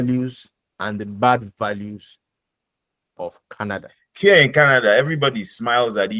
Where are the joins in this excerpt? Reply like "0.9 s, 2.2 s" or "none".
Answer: 4.0 s